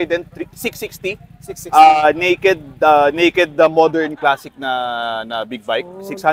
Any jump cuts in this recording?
no; 0 cuts

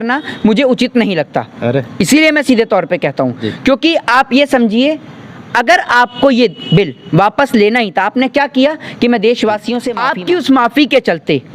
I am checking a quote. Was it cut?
yes; 1 cut; at 9.9 s

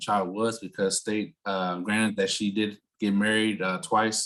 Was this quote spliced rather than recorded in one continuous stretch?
no; 0 cuts

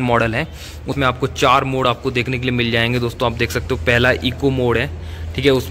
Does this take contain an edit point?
yes; 1 cut; at 0.9 s

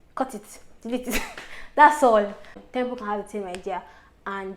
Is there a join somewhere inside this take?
yes; 1 cut; at 2.5 s

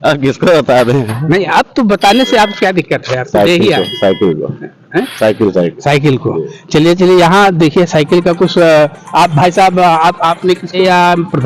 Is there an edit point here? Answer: no; 0 cuts

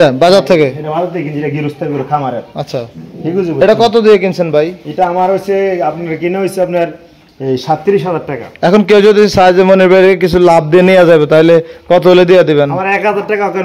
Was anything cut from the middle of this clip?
no; 0 cuts

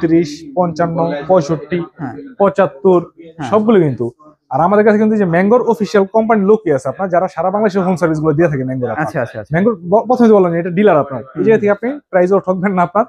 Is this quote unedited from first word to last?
yes; 0 cuts

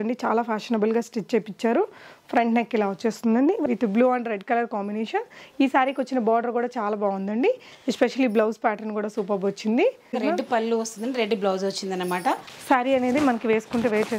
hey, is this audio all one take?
no; 3 cuts; at 3.6 s, 10.2 s, 12.5 s

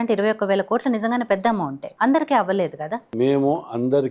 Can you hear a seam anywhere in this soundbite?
yes; 2 cuts; at 1.8 s, 3.1 s

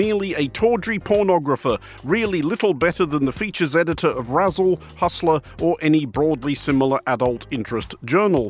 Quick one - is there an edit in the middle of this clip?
no; 0 cuts

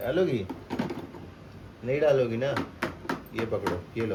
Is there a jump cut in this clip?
no; 0 cuts

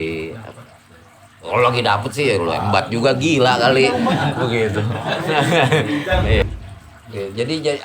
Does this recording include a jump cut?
yes; 1 cut; at 6.4 s

